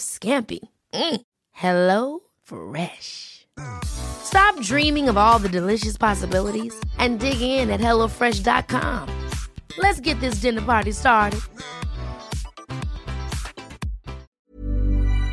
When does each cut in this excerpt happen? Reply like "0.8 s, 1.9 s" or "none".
14.4 s